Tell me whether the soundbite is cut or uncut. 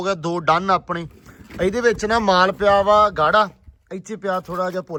uncut